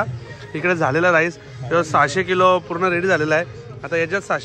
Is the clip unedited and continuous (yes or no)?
yes